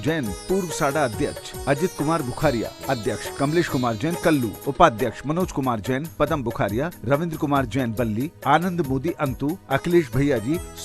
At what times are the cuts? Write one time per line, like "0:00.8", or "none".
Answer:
0:03.2
0:04.6